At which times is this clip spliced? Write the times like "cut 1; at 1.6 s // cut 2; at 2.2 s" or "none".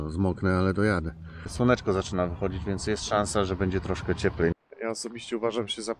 cut 1; at 1.5 s // cut 2; at 4.5 s